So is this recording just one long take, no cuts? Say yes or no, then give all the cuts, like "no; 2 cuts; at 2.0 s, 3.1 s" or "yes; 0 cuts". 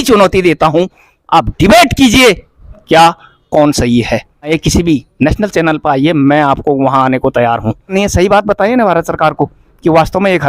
no; 2 cuts; at 4.5 s, 7.9 s